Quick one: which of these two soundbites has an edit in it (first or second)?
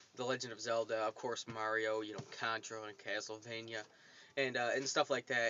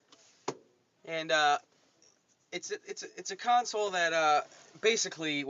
second